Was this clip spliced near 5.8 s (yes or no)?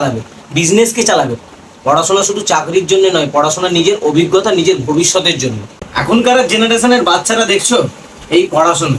yes